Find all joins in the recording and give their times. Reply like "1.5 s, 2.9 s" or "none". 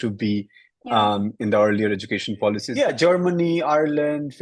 2.7 s